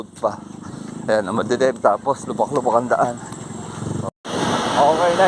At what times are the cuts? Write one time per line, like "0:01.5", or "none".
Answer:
0:04.0